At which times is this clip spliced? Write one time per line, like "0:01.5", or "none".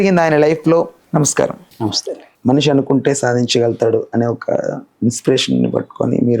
0:01.0